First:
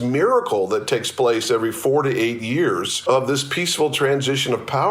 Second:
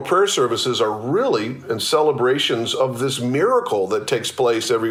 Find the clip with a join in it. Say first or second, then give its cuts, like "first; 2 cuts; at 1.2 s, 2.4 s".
first; 1 cut; at 2.9 s